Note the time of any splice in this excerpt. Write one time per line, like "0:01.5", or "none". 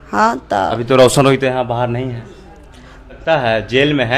0:03.2